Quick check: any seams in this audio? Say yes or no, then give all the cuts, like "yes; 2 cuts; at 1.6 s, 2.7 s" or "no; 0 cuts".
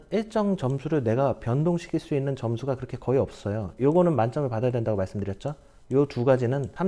no; 0 cuts